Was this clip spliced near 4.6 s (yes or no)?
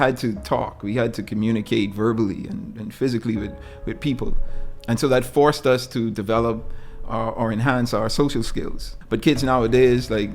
yes